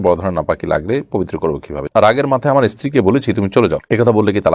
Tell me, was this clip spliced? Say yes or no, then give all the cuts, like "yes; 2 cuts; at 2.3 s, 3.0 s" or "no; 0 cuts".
yes; 1 cut; at 1.8 s